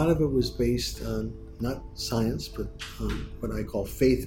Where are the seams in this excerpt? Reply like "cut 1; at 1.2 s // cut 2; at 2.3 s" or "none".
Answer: none